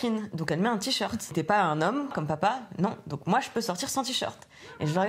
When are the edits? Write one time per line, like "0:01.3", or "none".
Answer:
0:01.3
0:02.1